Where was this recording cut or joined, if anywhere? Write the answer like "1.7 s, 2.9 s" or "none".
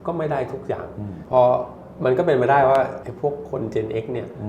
1.2 s